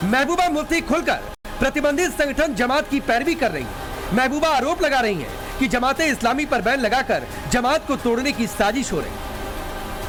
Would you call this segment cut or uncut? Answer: uncut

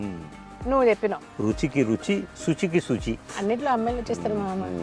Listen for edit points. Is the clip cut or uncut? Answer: cut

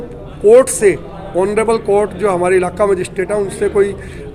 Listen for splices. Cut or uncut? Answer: uncut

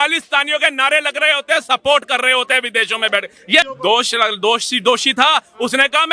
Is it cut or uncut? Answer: cut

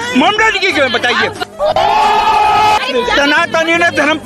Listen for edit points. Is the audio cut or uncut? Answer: cut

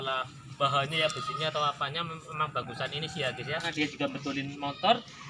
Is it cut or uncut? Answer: cut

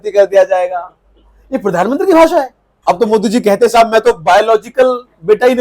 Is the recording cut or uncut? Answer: cut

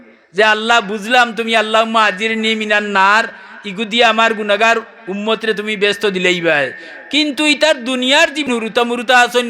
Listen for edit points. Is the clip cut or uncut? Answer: cut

